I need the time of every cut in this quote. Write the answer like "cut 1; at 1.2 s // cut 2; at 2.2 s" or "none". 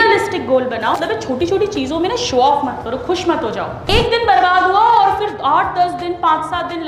cut 1; at 1.0 s // cut 2; at 3.9 s